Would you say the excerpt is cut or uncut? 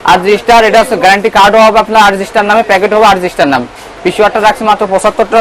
uncut